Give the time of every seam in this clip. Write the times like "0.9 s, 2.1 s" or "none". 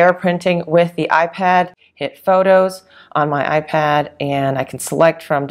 1.8 s